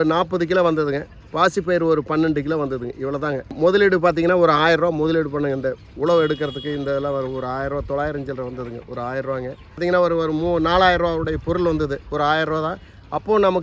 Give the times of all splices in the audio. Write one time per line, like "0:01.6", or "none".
0:03.5
0:09.8

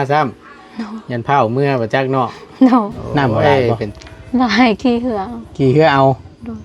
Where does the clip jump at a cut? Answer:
0:03.9

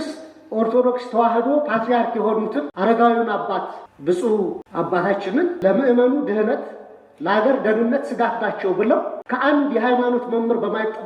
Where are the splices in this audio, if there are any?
0:02.7
0:03.8
0:04.6
0:05.6
0:09.2

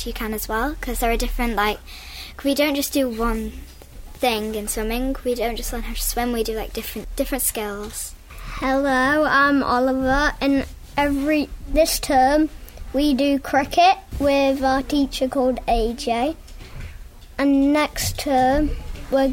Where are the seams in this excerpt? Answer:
0:08.2

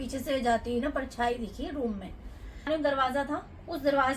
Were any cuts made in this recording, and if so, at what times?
0:02.7

